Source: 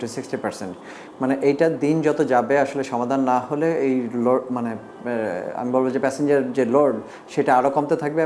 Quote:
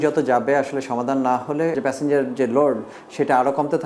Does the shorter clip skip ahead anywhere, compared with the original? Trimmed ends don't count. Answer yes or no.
yes